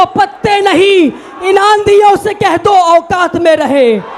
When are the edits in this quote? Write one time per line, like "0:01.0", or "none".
none